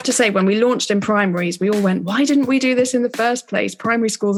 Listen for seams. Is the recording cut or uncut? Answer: uncut